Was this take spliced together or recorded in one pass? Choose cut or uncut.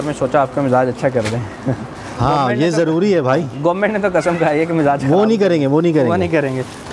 uncut